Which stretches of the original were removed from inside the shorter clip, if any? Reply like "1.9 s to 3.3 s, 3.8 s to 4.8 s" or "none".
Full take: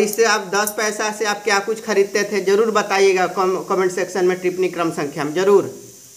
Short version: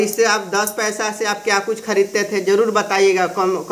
none